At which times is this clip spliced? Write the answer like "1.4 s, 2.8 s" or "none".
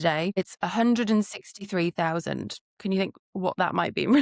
none